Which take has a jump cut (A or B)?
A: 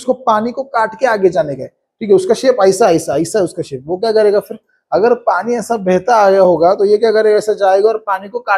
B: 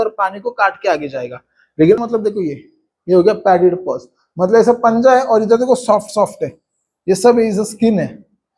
B